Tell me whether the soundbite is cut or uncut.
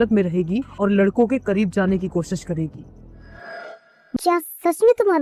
cut